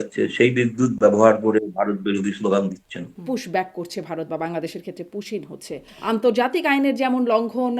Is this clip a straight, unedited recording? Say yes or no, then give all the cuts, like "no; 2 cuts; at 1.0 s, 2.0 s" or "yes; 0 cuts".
no; 2 cuts; at 3.2 s, 5.9 s